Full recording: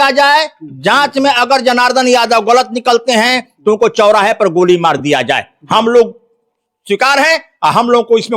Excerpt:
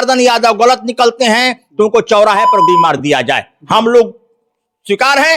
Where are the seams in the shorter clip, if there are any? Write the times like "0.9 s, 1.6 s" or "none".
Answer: 2.7 s